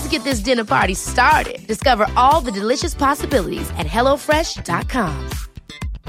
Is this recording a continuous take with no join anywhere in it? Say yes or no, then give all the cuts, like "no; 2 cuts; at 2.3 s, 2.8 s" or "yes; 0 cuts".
yes; 0 cuts